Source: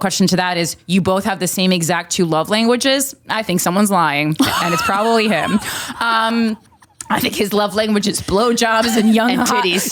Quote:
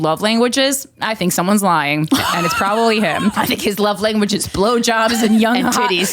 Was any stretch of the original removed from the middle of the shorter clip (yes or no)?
yes